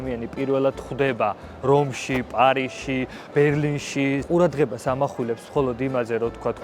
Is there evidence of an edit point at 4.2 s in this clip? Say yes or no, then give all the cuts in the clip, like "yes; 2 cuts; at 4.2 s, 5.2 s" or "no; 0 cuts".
yes; 1 cut; at 4.2 s